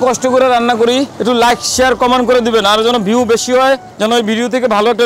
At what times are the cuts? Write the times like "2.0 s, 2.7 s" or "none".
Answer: 1.1 s, 3.9 s

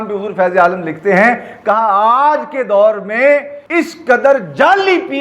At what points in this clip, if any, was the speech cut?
3.6 s

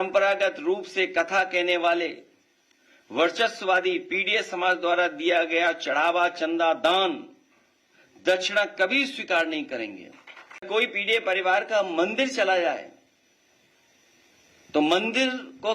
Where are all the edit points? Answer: 10.6 s

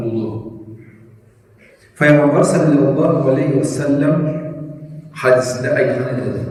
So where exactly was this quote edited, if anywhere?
none

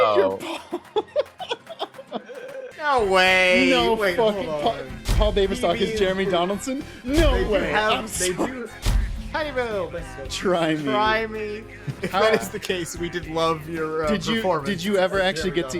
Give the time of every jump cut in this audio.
2.7 s, 11.9 s

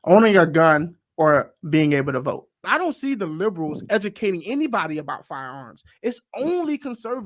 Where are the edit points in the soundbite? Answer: 2.5 s

